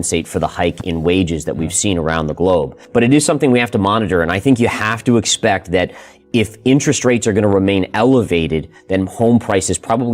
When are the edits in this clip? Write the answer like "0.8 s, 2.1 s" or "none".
2.8 s